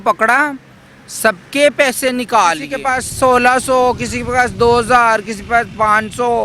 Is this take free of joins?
no; 1 cut; at 2.7 s

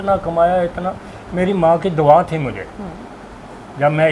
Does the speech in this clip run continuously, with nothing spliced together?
yes; 0 cuts

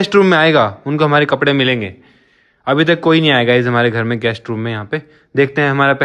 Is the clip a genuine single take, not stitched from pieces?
yes; 0 cuts

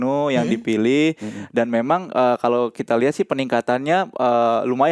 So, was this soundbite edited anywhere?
no; 0 cuts

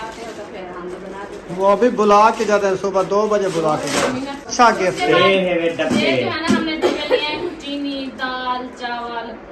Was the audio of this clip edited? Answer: yes; 1 cut; at 4.5 s

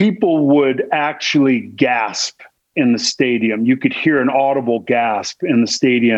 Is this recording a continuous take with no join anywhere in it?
yes; 0 cuts

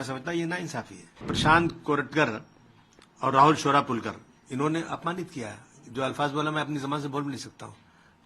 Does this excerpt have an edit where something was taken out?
yes; 1 cut; at 1.3 s

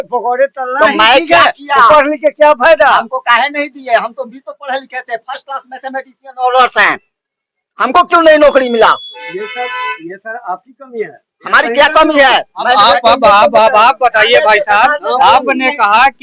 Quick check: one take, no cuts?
yes; 0 cuts

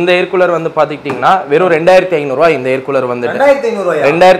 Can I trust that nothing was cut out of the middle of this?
yes; 0 cuts

